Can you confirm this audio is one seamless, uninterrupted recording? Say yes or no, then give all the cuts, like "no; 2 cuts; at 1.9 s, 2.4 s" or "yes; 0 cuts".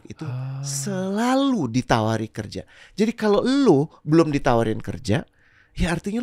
yes; 0 cuts